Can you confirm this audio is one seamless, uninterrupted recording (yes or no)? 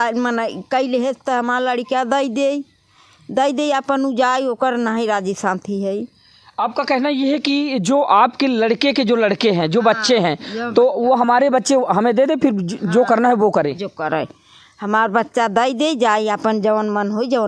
yes